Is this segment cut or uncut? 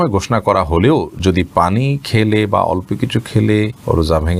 uncut